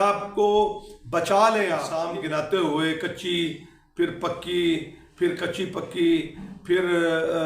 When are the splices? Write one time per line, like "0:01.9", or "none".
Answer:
0:01.9